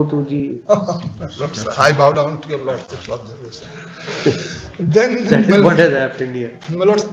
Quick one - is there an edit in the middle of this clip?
no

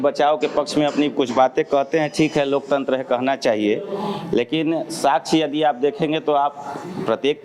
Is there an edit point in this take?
no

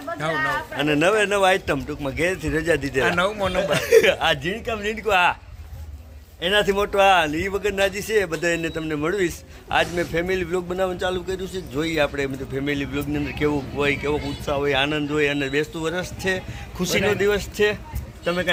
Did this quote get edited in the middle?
no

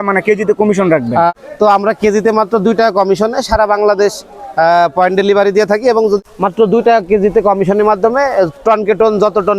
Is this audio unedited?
no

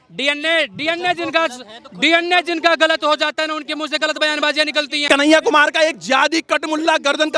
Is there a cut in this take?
yes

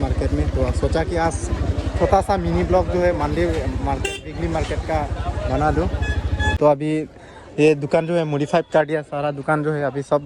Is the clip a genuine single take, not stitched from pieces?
no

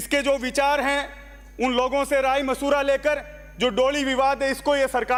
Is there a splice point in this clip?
no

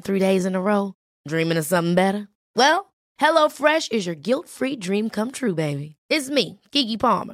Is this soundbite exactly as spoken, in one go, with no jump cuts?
yes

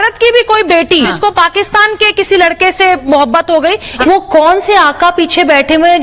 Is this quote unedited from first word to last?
no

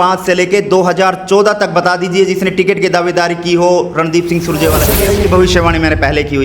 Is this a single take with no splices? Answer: no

